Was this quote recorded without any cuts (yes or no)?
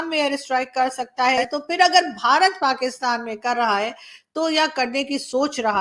no